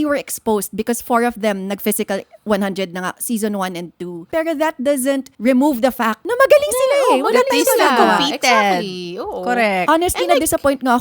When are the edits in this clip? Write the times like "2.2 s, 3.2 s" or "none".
4.2 s, 5.3 s, 6.2 s